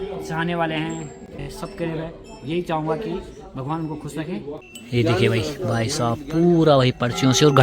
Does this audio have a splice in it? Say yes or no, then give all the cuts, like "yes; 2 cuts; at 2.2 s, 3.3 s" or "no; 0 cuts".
yes; 2 cuts; at 1.4 s, 4.7 s